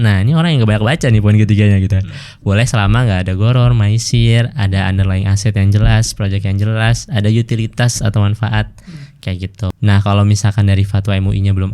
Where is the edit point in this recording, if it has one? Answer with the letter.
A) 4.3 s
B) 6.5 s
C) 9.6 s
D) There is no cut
C